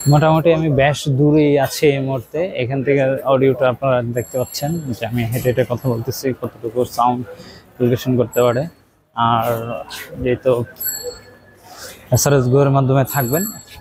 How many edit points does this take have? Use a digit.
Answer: 0